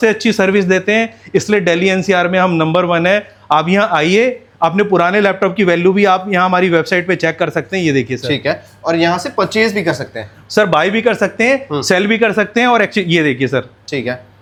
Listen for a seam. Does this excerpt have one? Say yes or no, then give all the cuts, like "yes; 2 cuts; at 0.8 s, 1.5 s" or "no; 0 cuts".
no; 0 cuts